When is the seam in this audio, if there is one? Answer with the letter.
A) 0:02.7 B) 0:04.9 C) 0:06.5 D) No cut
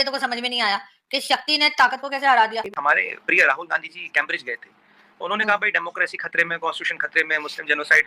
A